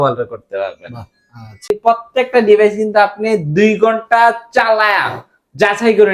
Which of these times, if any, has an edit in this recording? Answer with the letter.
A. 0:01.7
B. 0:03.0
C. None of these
A